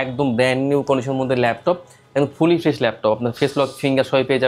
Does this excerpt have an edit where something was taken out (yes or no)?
no